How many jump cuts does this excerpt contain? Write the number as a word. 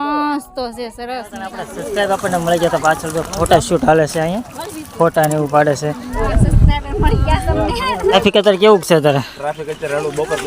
three